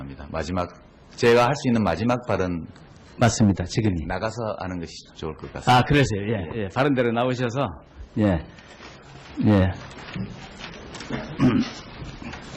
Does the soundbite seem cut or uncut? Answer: uncut